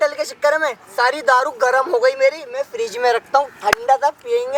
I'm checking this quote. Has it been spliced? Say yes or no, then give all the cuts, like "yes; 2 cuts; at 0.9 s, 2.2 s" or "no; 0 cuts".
no; 0 cuts